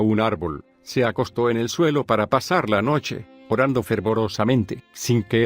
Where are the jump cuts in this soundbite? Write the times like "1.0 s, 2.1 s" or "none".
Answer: 4.0 s